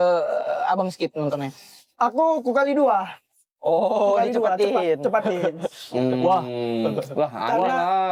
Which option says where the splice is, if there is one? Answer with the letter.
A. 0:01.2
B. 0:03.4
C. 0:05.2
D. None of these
D